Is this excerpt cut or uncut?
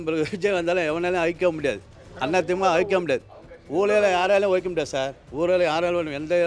uncut